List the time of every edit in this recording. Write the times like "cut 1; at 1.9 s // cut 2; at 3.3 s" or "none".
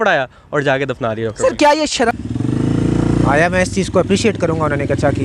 cut 1; at 2.2 s

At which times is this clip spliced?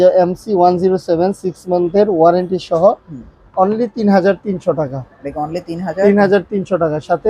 none

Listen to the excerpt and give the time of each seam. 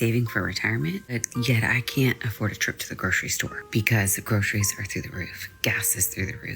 cut 1; at 1.2 s // cut 2; at 3.6 s

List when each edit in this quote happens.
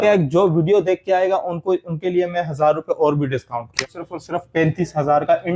cut 1; at 3.8 s

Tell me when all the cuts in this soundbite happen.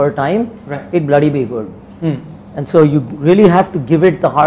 none

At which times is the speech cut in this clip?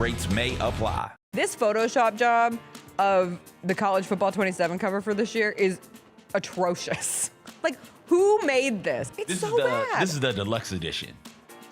cut 1; at 1.2 s

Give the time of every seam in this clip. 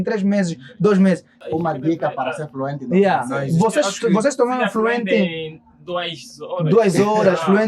cut 1; at 1.4 s

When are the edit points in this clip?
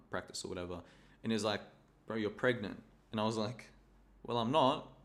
none

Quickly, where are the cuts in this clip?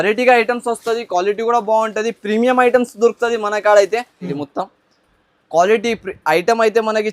cut 1; at 4.3 s

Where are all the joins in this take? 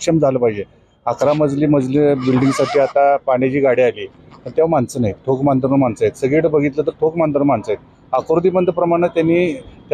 none

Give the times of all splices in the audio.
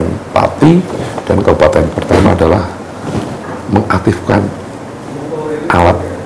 cut 1; at 2.0 s

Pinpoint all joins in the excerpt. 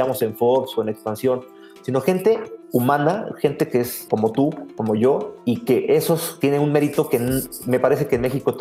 cut 1; at 2.5 s // cut 2; at 4.0 s // cut 3; at 5.3 s // cut 4; at 6.3 s

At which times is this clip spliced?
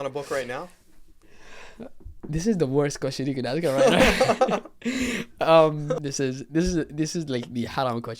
cut 1; at 6.1 s

